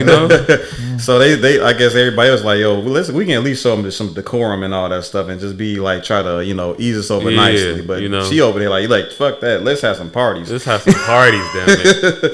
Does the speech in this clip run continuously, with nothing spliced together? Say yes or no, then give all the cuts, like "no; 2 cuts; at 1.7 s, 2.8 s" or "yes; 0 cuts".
yes; 0 cuts